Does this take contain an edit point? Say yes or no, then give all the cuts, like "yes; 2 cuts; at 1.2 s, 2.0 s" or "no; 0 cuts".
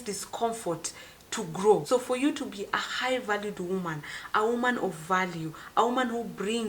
yes; 1 cut; at 1.8 s